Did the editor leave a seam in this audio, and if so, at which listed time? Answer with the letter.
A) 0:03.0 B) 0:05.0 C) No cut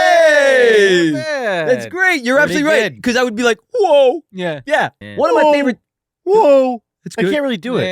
B